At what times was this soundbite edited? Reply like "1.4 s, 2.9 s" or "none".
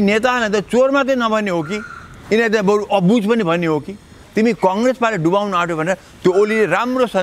4.2 s